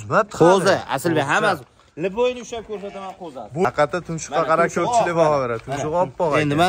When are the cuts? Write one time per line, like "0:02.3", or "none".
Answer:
0:03.6